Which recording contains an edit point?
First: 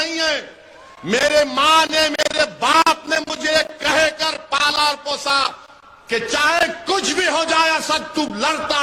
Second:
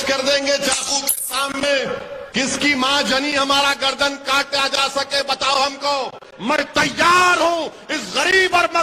second; 2 cuts; at 2.2 s, 6.3 s

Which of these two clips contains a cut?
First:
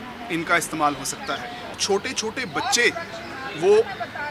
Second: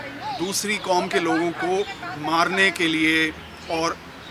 first; 1 cut; at 1.8 s

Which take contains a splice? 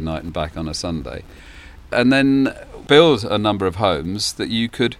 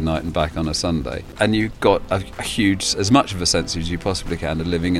second; 1 cut; at 1.3 s

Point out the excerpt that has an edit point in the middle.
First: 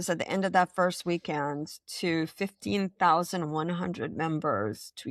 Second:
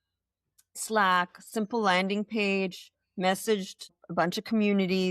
second; 1 cut; at 4.0 s

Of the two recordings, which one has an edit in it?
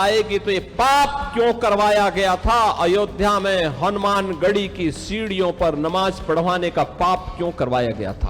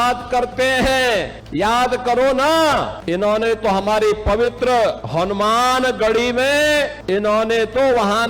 second; 4 cuts; at 1.4 s, 3.0 s, 5.0 s, 7.0 s

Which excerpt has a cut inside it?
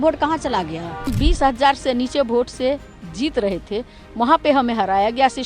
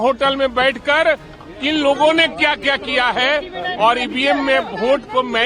first; 1 cut; at 1.1 s

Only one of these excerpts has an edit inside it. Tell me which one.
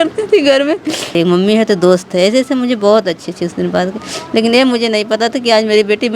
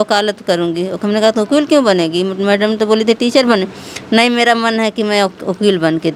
first; 1 cut; at 1.1 s

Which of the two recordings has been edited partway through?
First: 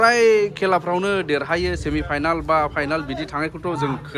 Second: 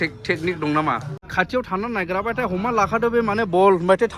second; 1 cut; at 1.2 s

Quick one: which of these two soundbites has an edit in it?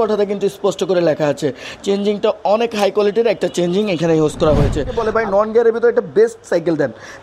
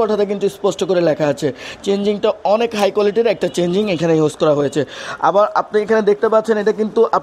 first; 1 cut; at 5.1 s

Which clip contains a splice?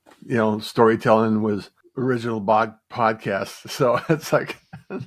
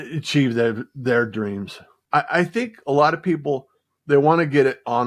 second; 1 cut; at 1.9 s

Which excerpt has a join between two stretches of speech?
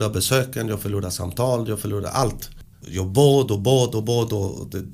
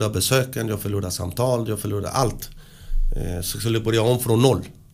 first; 1 cut; at 2.8 s

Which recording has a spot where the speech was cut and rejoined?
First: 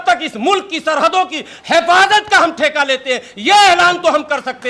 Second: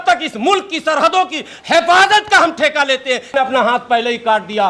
second; 1 cut; at 3.3 s

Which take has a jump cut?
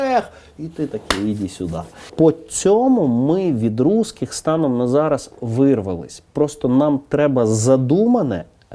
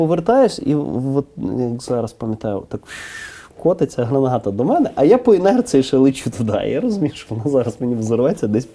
first; 1 cut; at 2.1 s

